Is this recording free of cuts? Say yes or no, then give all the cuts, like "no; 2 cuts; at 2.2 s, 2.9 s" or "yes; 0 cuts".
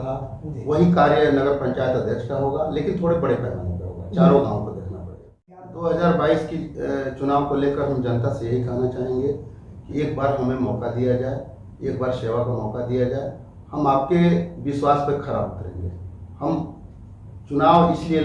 no; 1 cut; at 5.6 s